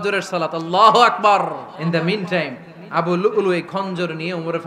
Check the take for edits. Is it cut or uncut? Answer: cut